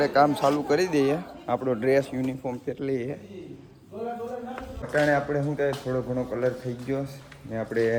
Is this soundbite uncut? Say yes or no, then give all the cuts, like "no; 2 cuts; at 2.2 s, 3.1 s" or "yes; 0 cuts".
yes; 0 cuts